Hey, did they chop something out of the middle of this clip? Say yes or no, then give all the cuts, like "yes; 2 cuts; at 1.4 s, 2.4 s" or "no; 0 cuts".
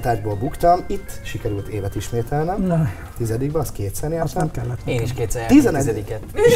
no; 0 cuts